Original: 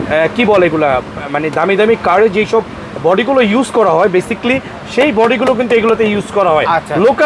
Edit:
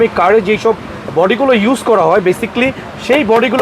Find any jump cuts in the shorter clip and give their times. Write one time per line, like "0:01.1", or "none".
none